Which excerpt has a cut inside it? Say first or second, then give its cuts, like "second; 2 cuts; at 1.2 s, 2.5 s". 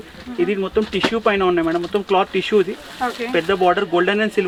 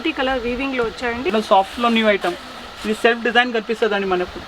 second; 1 cut; at 1.3 s